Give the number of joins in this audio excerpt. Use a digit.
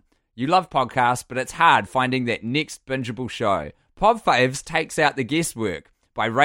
2